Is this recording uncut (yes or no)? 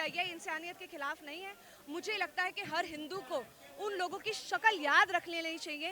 yes